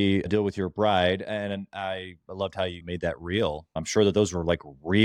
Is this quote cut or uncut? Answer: cut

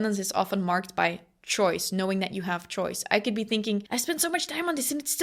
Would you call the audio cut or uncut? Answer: cut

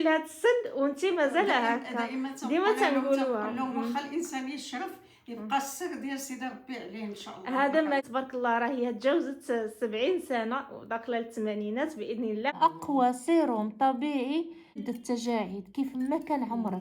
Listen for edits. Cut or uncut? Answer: cut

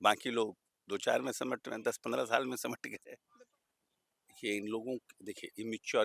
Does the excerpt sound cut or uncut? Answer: cut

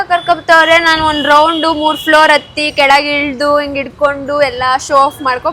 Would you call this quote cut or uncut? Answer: uncut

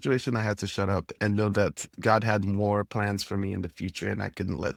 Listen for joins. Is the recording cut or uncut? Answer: uncut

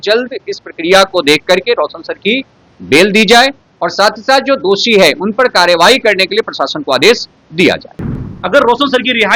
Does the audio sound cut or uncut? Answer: cut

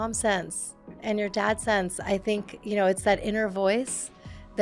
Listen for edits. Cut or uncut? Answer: cut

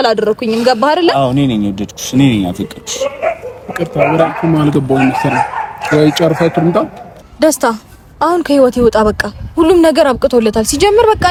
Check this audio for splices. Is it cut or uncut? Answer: uncut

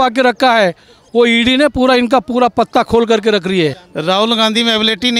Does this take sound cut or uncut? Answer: cut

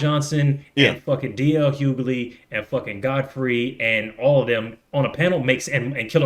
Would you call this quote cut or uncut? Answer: uncut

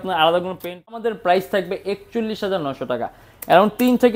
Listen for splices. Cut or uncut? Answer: cut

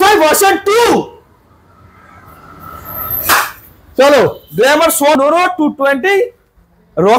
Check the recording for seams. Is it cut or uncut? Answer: cut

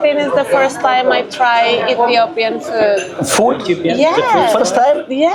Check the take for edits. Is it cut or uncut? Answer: uncut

